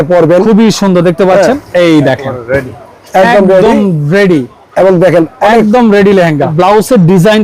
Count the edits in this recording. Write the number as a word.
two